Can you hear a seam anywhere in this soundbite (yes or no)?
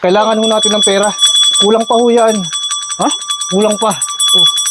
yes